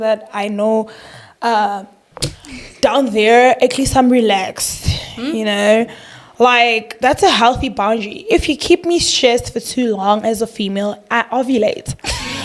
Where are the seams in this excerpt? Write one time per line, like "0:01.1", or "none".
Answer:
none